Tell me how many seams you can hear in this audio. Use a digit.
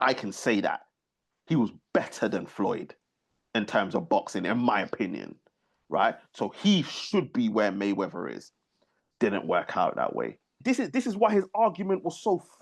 1